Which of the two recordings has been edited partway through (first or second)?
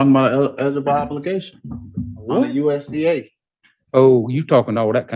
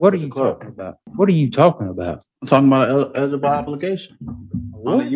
second